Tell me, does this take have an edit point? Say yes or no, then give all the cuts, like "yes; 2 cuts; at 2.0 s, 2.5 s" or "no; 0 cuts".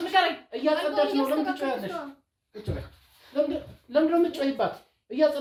no; 0 cuts